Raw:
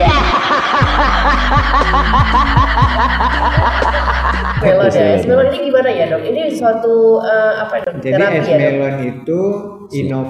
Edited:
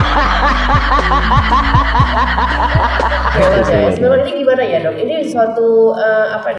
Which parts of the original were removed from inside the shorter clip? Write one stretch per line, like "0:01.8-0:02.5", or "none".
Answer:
0:04.1-0:04.6